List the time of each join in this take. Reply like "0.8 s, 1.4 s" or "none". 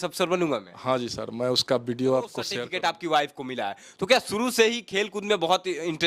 2.4 s